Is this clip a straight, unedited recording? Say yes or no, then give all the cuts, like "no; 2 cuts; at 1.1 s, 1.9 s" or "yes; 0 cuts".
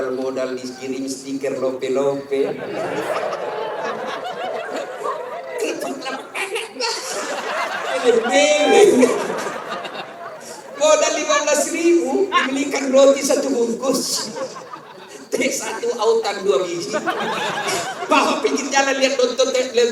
yes; 0 cuts